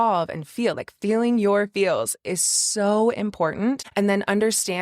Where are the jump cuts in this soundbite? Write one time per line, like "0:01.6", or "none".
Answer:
0:03.8

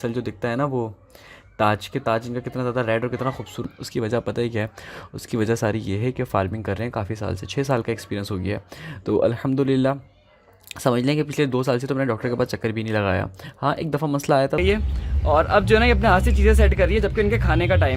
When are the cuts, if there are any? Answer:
0:03.6
0:14.6

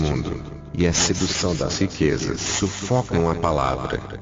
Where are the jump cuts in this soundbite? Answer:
0:02.5

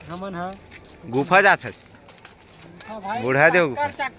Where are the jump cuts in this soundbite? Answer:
none

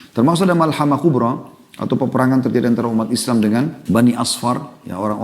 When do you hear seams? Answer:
0:03.8

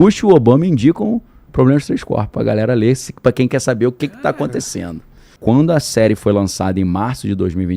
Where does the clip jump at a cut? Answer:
0:05.3

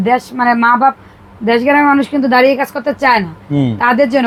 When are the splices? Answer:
none

